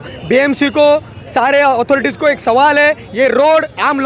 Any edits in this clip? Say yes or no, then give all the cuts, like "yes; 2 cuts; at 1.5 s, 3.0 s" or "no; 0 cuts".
no; 0 cuts